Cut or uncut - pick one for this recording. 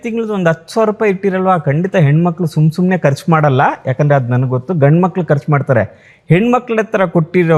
uncut